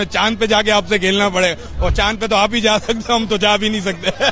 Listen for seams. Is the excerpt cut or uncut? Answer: uncut